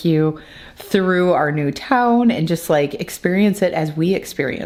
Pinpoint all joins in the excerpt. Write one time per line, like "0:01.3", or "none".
none